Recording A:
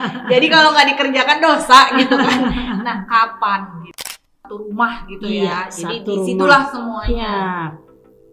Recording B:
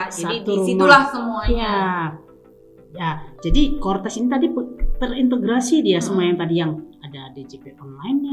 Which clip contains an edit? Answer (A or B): A